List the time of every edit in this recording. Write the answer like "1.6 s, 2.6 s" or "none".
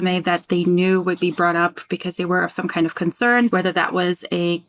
3.5 s